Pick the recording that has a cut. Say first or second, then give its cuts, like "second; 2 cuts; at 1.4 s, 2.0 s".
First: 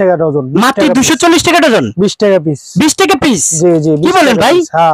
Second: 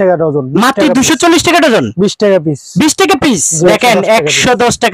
second; 1 cut; at 3.7 s